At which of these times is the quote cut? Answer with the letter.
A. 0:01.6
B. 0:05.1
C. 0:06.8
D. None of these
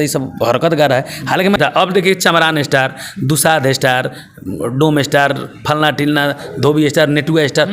A